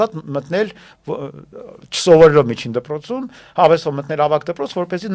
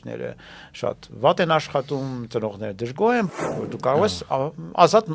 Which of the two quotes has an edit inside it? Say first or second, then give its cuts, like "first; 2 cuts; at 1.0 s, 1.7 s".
second; 1 cut; at 3.3 s